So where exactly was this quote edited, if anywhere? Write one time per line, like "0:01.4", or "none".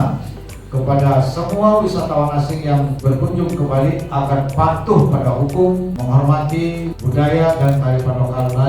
0:02.9
0:06.0
0:07.0